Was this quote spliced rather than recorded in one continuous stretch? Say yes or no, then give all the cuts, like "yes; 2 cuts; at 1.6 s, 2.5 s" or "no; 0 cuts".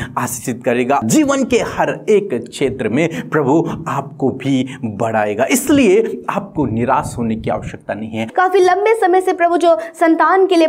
yes; 2 cuts; at 1.0 s, 8.3 s